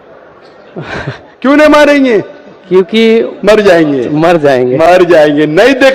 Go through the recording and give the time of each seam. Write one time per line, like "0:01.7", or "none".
none